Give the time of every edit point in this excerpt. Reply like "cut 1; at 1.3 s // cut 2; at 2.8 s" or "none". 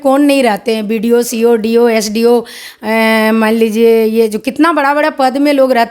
none